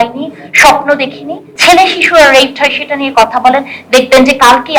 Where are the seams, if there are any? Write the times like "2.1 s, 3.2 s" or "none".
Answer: 1.5 s